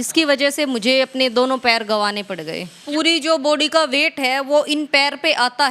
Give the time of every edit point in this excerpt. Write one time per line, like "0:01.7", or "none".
0:02.8